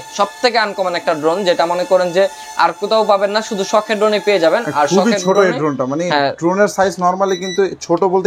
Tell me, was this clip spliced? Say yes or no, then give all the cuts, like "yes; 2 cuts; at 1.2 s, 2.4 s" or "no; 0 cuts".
no; 0 cuts